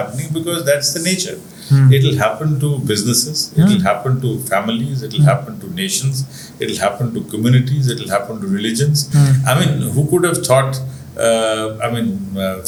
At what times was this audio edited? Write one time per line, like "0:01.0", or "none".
none